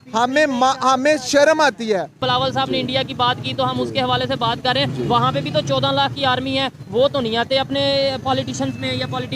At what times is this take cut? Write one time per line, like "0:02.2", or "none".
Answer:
0:02.2